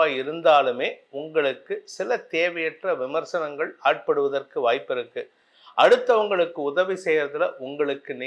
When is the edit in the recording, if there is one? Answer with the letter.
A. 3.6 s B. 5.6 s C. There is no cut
C